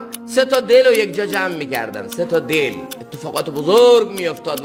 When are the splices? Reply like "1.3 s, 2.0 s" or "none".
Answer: none